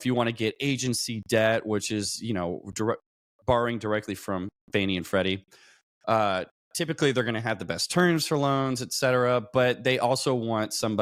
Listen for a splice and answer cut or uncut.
uncut